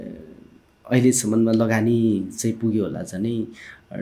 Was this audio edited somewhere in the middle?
no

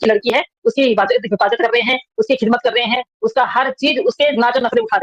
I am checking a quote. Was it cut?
no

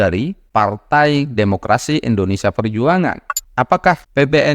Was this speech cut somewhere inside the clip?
yes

